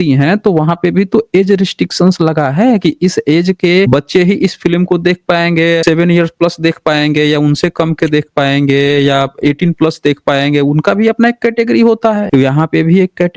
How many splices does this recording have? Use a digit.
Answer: 3